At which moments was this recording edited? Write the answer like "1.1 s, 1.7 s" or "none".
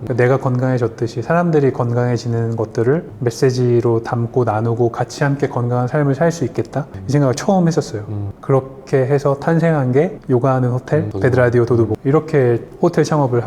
none